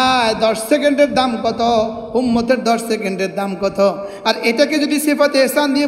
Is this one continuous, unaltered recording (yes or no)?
yes